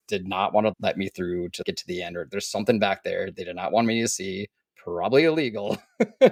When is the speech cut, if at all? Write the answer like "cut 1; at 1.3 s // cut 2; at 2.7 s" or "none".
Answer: none